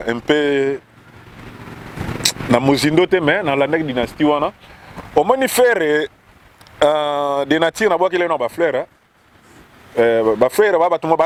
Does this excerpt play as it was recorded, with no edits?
yes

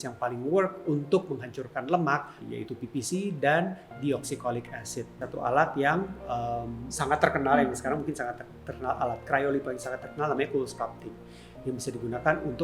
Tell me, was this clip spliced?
yes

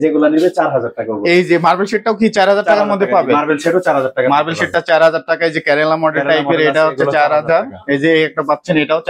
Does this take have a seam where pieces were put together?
no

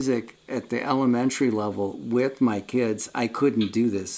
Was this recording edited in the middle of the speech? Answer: no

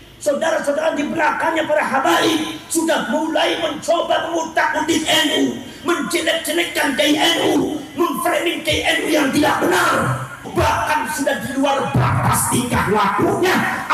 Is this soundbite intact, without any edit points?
no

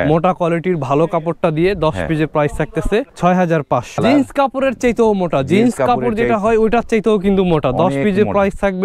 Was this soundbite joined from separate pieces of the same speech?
yes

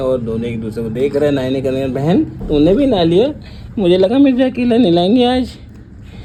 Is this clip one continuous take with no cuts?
yes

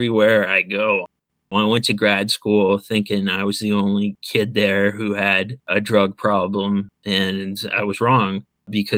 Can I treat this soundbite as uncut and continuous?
no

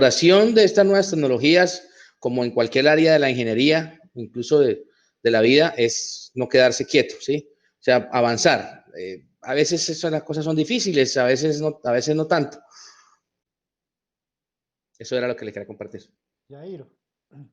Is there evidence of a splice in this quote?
no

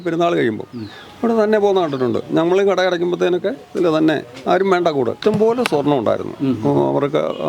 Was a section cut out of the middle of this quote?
yes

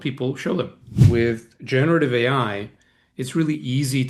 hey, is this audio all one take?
no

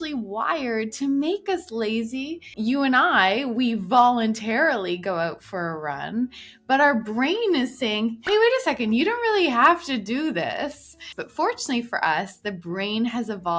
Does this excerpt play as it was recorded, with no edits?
no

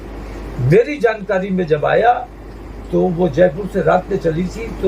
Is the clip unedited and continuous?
yes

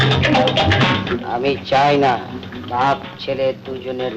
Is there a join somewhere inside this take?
yes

